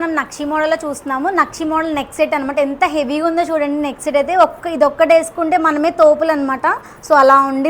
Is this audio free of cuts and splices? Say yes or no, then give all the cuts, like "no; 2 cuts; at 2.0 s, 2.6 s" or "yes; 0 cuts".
yes; 0 cuts